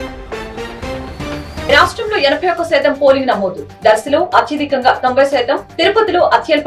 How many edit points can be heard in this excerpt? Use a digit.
1